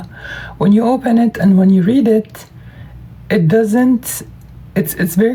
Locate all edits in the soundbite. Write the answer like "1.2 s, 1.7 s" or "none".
none